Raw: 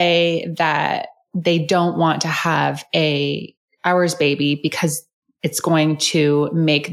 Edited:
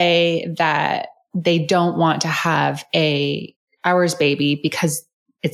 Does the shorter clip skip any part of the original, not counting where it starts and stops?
no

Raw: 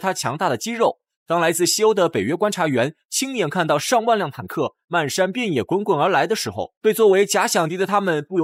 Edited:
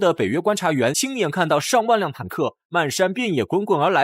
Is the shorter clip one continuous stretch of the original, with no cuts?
no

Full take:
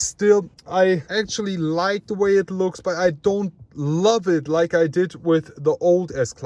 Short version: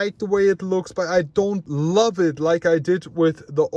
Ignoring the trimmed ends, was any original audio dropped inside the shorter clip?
yes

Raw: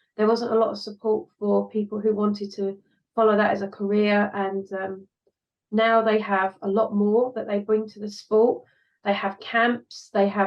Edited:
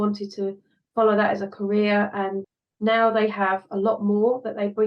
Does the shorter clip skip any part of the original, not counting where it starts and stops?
yes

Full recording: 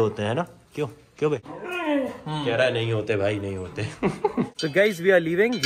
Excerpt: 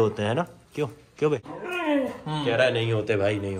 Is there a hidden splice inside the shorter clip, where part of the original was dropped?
no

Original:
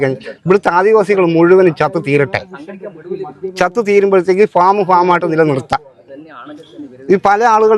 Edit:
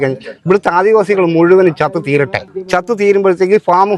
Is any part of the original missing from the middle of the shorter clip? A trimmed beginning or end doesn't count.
yes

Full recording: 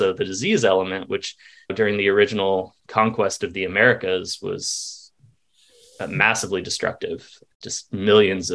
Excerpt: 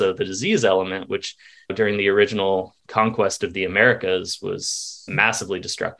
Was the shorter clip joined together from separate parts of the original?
yes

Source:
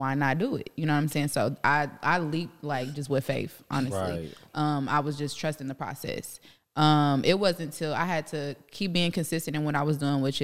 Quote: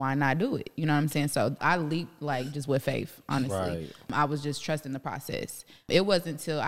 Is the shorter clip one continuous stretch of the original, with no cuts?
no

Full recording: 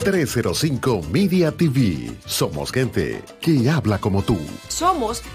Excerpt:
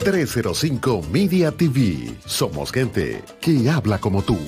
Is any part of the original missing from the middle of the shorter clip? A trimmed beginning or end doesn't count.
no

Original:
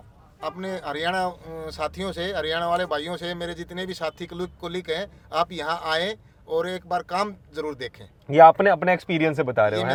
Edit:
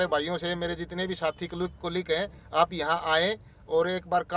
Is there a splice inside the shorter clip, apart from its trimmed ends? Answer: no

